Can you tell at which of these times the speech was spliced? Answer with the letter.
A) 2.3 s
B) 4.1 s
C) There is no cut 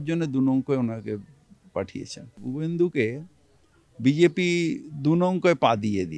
A